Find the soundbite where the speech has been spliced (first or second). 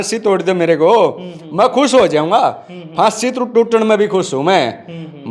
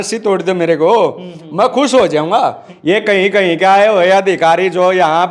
second